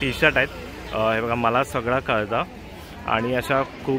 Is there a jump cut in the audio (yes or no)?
no